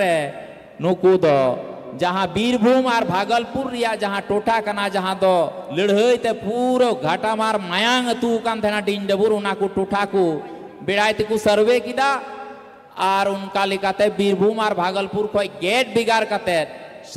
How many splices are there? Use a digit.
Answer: 0